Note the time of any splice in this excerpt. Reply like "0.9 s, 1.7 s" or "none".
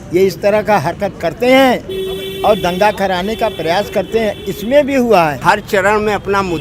5.4 s